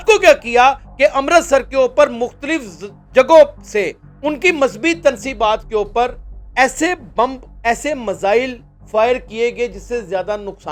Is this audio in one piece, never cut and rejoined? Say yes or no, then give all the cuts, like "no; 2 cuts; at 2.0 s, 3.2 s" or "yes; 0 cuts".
yes; 0 cuts